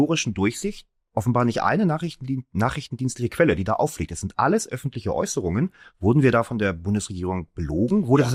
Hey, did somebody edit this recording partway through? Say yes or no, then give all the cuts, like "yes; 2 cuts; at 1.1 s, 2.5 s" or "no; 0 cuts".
no; 0 cuts